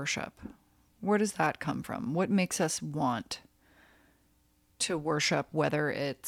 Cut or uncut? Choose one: uncut